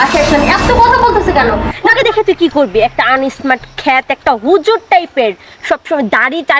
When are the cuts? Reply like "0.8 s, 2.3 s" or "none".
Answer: 2.0 s